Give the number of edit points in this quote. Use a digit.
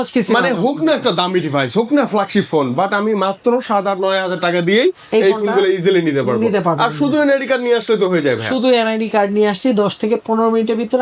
0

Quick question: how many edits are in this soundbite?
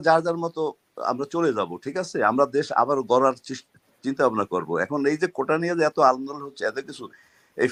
0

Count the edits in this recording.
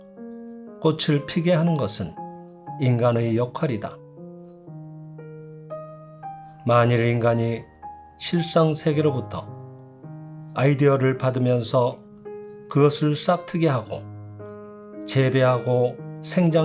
2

